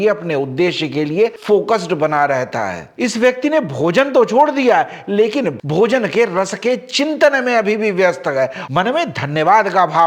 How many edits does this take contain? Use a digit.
2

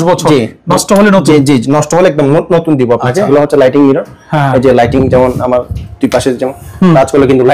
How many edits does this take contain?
1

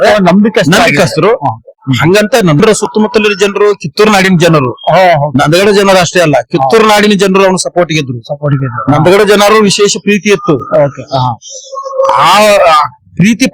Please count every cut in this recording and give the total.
1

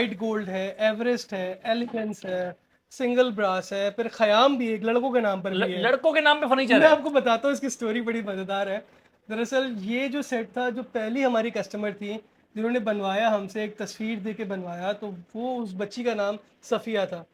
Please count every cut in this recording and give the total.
0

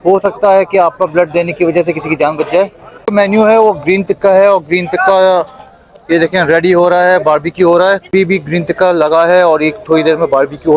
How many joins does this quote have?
2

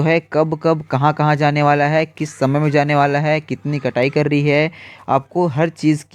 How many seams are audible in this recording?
0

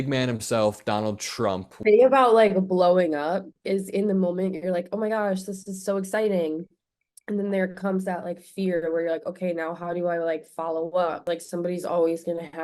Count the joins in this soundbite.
2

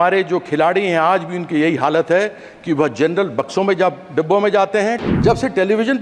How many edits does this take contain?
1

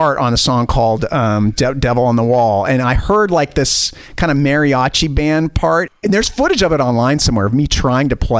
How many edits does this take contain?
1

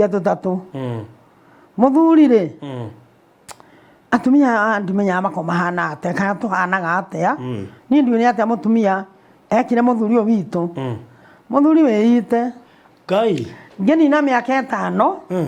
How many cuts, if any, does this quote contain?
0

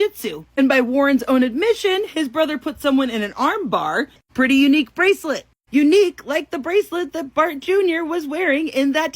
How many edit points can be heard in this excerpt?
1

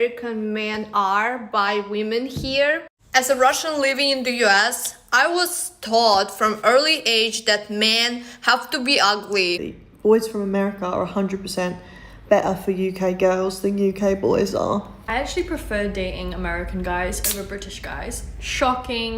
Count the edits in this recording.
3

